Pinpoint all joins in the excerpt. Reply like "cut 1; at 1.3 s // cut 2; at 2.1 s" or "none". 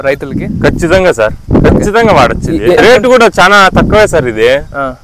cut 1; at 2.8 s